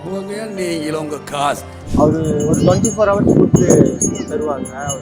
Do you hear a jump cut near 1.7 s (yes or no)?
yes